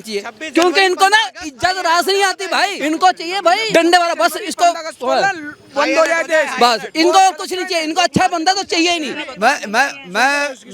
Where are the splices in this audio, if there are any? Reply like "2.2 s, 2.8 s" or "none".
2.8 s, 3.6 s, 9.2 s